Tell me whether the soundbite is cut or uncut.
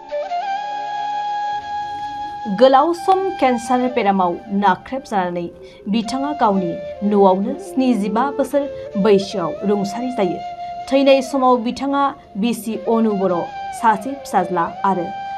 cut